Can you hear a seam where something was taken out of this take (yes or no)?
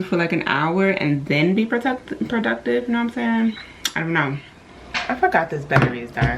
no